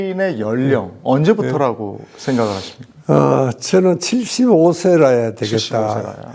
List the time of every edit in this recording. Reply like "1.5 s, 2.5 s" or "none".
none